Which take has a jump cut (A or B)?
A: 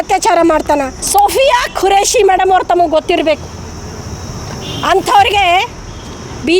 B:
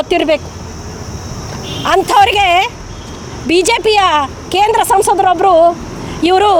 A